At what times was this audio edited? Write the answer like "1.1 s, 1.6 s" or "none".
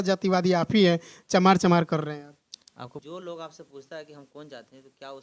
3.0 s